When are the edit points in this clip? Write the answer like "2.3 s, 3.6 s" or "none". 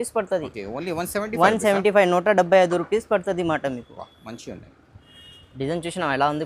4.8 s